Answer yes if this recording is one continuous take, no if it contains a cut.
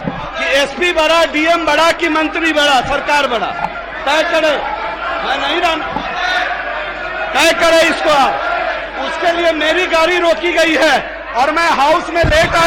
yes